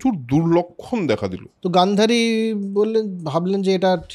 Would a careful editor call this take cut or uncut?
cut